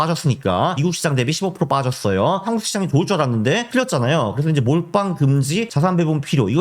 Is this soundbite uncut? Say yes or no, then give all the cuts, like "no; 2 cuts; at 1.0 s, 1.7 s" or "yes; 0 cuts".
no; 4 cuts; at 0.8 s, 2.4 s, 3.7 s, 5.7 s